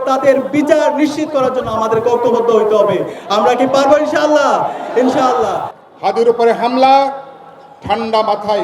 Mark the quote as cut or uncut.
cut